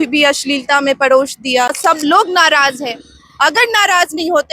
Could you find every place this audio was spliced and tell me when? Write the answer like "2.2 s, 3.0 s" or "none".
1.7 s